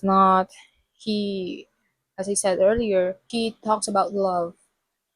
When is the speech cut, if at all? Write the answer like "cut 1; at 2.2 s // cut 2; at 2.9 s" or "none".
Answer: cut 1; at 3.2 s

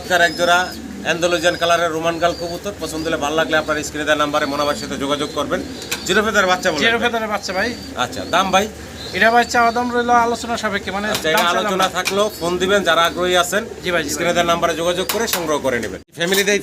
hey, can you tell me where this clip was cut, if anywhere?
none

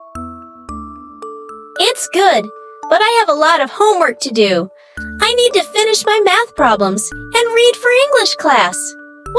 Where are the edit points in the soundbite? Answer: cut 1; at 1.8 s

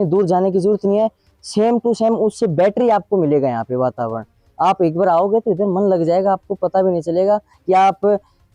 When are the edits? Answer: none

